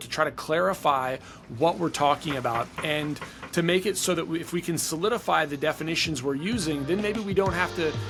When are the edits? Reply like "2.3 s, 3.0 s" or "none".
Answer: none